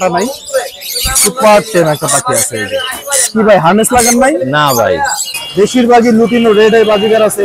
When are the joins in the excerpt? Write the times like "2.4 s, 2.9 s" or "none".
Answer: 5.2 s